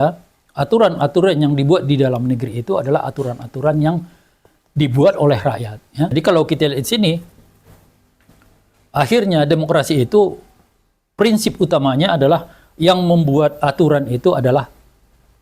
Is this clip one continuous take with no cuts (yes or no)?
no